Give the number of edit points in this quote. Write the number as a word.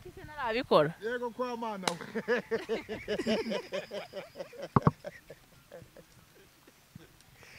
zero